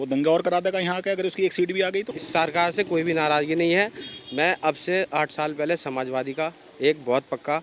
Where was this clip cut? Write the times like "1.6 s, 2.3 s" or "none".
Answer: 2.2 s

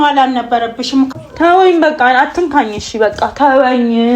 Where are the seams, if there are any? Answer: 1.1 s

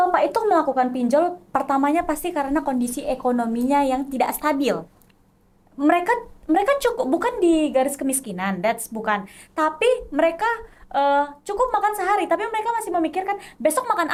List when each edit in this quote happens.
none

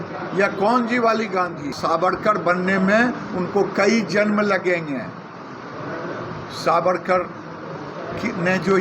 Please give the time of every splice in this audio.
1.7 s

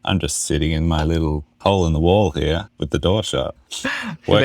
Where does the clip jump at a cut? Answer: 2.7 s, 3.6 s

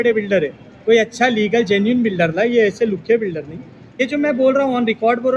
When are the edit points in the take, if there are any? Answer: 4.0 s

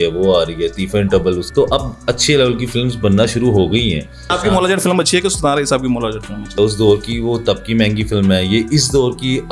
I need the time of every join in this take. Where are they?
1.5 s, 4.3 s, 6.6 s

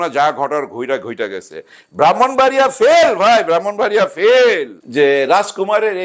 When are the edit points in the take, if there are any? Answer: 4.8 s

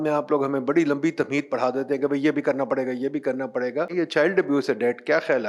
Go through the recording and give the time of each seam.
3.9 s

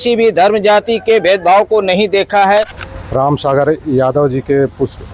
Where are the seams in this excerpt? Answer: 2.8 s

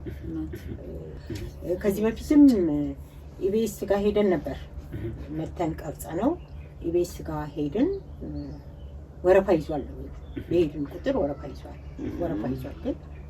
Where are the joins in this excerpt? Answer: 1.1 s

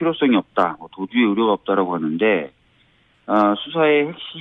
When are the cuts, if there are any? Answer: none

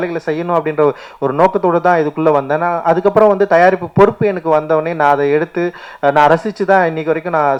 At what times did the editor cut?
none

